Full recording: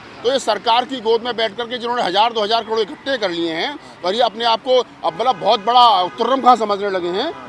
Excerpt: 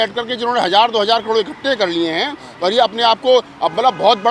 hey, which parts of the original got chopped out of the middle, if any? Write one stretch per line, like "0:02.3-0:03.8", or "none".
none